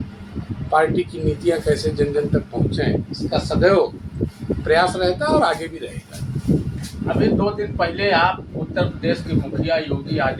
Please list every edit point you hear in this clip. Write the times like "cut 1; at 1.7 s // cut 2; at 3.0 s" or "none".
none